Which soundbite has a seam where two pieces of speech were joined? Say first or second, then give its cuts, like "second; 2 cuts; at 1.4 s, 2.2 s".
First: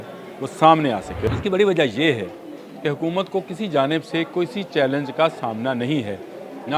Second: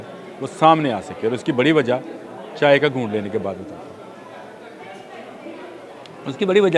first; 1 cut; at 1.3 s